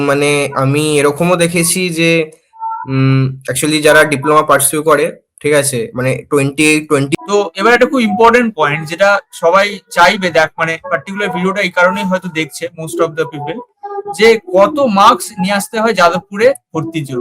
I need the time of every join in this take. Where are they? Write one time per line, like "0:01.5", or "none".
0:07.2